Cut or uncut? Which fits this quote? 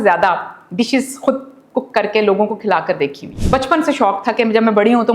cut